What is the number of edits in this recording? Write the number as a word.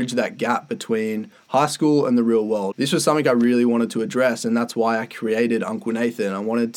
one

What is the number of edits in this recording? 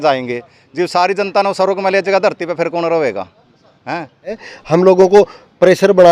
one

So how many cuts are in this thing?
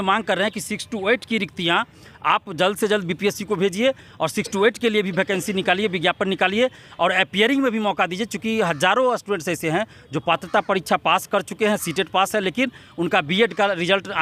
zero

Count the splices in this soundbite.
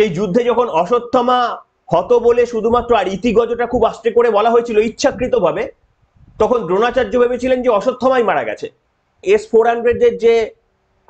one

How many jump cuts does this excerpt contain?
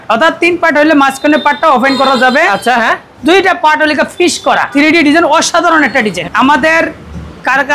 two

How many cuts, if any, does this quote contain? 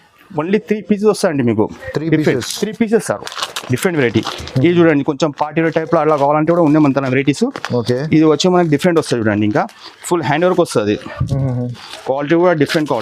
zero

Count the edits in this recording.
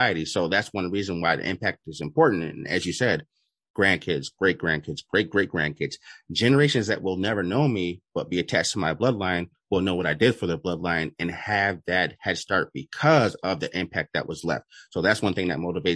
zero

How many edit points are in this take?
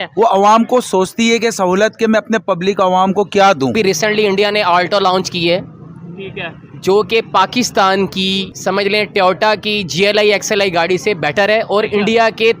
two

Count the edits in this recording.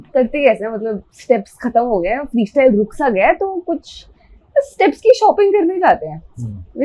zero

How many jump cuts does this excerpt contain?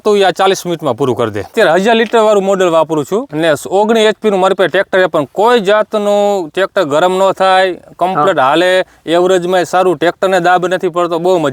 two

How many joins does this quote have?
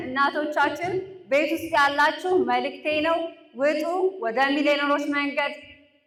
zero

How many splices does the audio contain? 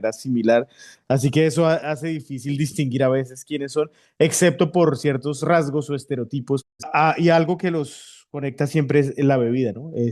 one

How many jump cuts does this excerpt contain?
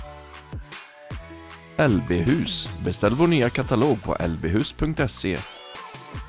one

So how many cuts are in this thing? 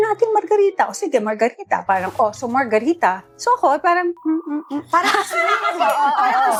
zero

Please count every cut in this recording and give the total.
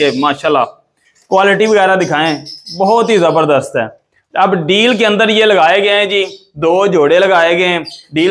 zero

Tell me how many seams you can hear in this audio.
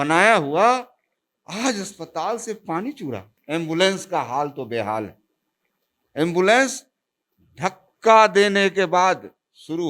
one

